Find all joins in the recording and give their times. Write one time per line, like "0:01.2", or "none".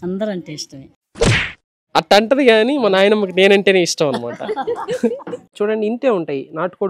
0:05.5